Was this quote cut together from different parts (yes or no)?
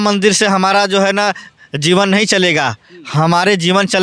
no